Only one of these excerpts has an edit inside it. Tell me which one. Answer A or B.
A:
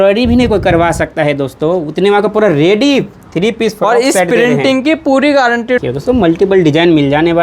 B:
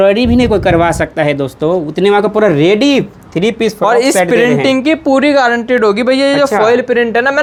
A